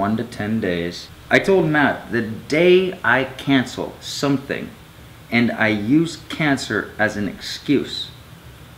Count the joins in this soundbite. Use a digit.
1